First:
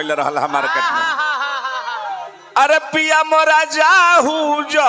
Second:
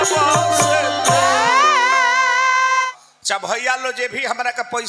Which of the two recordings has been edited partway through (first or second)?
second